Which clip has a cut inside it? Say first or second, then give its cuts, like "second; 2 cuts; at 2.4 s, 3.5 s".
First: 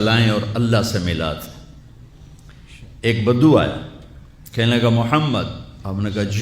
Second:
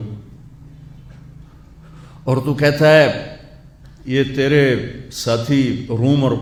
first; 1 cut; at 4.9 s